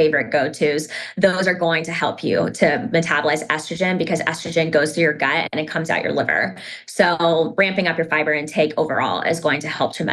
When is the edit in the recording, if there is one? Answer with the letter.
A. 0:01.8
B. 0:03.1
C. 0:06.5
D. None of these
D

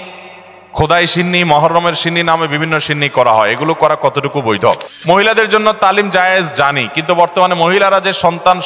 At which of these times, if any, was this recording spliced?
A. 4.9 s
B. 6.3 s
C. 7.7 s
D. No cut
A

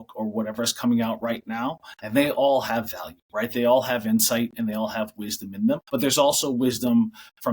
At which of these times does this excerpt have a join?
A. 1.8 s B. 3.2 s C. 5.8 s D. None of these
C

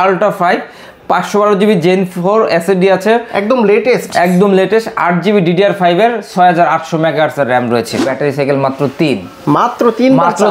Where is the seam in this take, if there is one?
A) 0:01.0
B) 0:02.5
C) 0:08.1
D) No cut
C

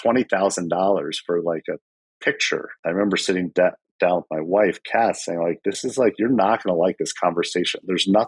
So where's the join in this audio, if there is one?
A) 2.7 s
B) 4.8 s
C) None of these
A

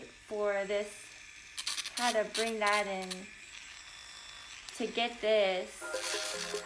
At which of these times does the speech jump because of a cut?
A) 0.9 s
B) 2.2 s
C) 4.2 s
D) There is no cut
D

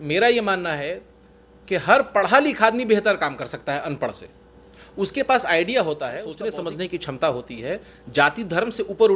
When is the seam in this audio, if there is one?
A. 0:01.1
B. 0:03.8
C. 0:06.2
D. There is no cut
C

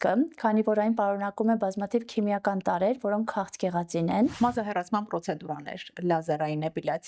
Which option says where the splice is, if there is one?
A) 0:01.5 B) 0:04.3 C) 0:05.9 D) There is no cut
B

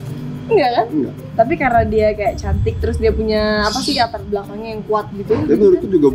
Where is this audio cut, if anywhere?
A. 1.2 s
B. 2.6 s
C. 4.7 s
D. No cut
A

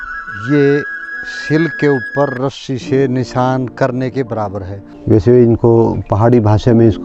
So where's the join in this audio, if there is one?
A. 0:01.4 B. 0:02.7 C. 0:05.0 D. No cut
C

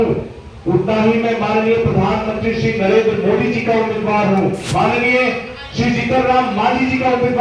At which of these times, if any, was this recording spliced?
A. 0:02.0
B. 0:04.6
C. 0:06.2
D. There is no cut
B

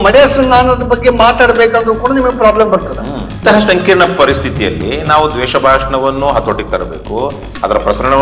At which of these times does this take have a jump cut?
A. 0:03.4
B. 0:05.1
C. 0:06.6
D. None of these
A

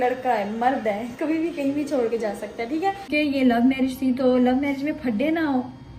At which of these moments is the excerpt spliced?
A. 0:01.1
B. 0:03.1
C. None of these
B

